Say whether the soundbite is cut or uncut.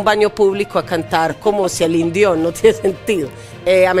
uncut